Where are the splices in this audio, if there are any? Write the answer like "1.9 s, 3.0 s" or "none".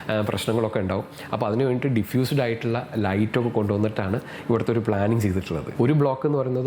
5.6 s